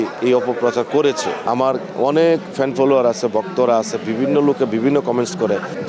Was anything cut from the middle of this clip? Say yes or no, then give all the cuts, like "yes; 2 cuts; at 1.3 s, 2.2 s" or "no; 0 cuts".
yes; 1 cut; at 1.4 s